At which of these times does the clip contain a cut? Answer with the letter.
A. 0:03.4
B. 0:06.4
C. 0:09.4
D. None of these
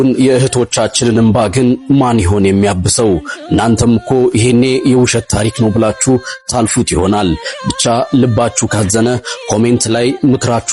D